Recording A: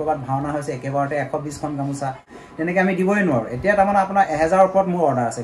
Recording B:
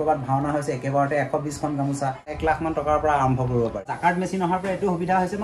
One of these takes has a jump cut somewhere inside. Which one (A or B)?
B